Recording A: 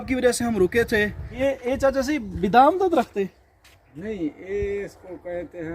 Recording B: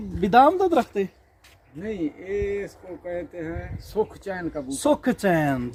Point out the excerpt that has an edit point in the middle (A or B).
A